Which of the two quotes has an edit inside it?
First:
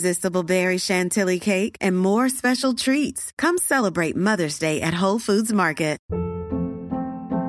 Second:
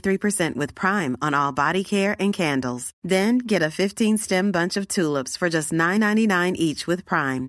first; 1 cut; at 6.0 s

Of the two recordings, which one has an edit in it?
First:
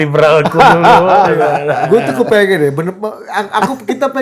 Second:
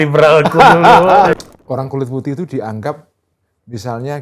second; 1 cut; at 1.3 s

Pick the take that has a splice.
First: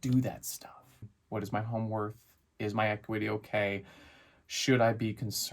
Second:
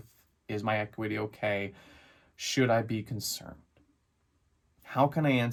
first; 1 cut; at 1.2 s

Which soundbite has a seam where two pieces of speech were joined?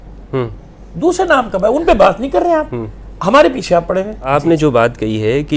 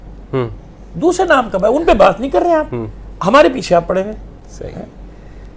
first; 1 cut; at 4.3 s

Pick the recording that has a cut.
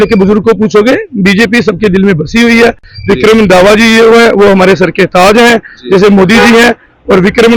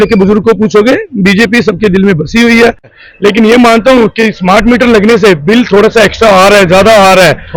second; 1 cut; at 2.9 s

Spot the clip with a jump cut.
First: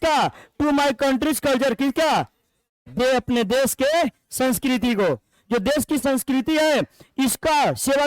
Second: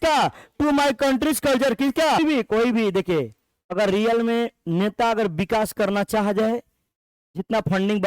second; 1 cut; at 2.2 s

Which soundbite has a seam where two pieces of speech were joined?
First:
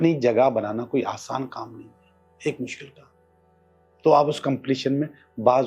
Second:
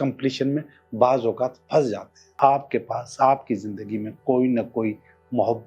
second; 1 cut; at 2.4 s

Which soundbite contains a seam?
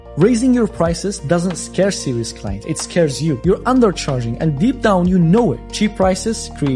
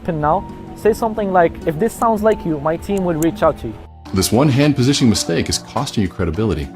second; 1 cut; at 3.8 s

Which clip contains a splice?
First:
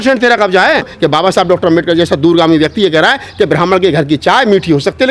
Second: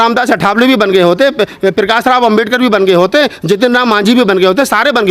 first; 1 cut; at 0.9 s

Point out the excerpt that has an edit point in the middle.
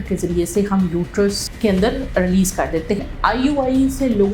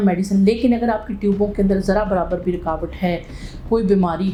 first; 1 cut; at 3.0 s

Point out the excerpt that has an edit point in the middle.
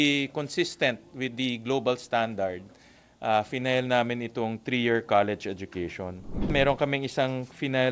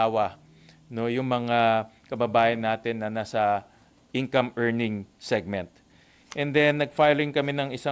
first; 1 cut; at 6.5 s

